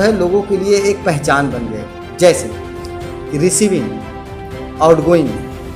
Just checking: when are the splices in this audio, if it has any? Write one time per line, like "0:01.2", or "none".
none

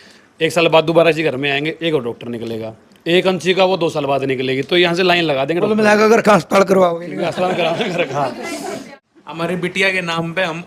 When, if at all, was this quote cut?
0:09.0

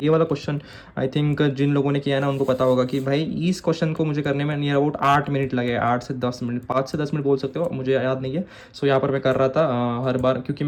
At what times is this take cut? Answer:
none

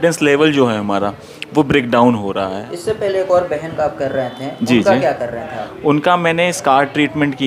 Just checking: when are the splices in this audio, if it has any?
0:02.7

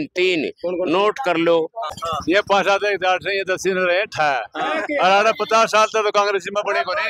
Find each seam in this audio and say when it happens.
0:02.0

